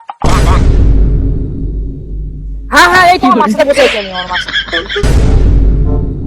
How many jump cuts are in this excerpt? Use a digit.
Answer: 1